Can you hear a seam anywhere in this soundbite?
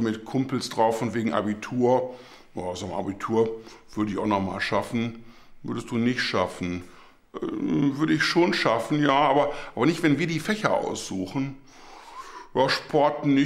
no; 0 cuts

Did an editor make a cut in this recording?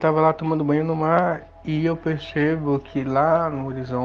yes; 1 cut; at 1.5 s

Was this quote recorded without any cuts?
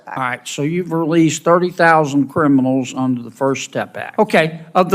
no; 1 cut; at 4.0 s

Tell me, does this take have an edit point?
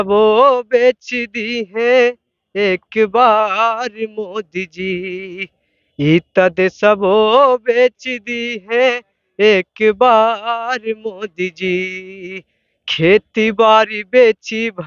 no; 0 cuts

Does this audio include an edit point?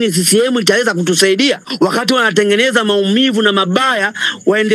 yes; 1 cut; at 1.7 s

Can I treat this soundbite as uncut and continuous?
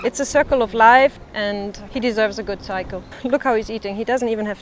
no; 2 cuts; at 1.5 s, 3.0 s

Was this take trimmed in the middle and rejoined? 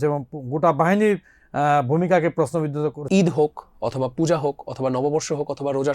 yes; 1 cut; at 3.0 s

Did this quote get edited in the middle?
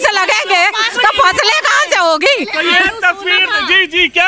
no; 0 cuts

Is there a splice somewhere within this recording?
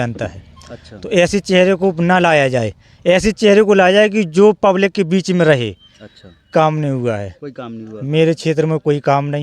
yes; 1 cut; at 6.5 s

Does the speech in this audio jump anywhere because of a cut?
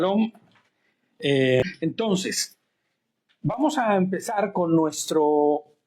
yes; 1 cut; at 1.6 s

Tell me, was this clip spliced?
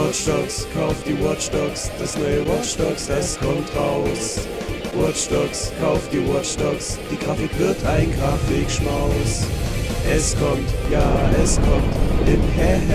no; 0 cuts

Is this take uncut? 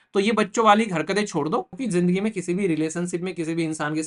no; 1 cut; at 1.7 s

